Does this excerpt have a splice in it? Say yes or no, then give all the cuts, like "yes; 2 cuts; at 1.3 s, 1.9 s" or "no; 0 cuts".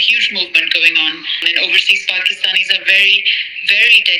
yes; 1 cut; at 1.5 s